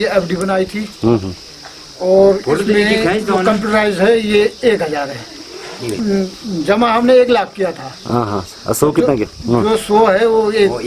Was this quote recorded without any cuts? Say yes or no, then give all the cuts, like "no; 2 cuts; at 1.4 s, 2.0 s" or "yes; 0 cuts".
yes; 0 cuts